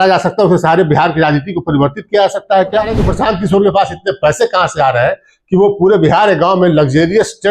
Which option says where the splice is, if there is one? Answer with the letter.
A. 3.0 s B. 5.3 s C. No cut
A